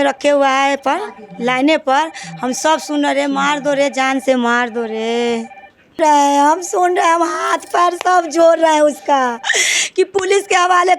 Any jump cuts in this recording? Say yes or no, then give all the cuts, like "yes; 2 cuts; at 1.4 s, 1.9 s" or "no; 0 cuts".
yes; 1 cut; at 6.0 s